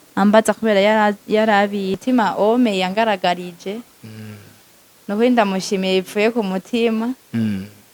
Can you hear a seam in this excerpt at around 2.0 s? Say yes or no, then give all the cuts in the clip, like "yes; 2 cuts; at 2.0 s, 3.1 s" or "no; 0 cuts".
yes; 1 cut; at 2.0 s